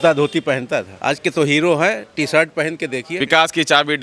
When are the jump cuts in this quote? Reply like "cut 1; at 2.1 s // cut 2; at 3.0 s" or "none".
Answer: cut 1; at 0.9 s // cut 2; at 3.1 s